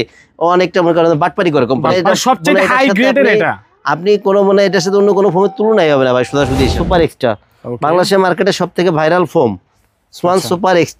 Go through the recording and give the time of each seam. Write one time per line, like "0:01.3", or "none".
0:01.9
0:06.7